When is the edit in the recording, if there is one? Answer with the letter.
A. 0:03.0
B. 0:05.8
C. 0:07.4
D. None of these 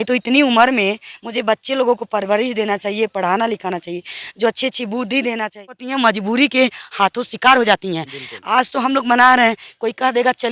B